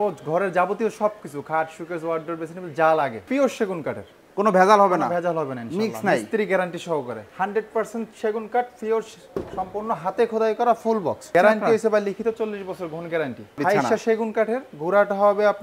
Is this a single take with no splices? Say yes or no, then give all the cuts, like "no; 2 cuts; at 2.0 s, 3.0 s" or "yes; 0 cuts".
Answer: no; 4 cuts; at 3.3 s, 7.2 s, 11.2 s, 13.6 s